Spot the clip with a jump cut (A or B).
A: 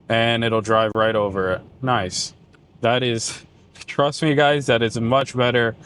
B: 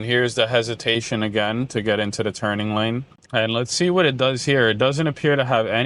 B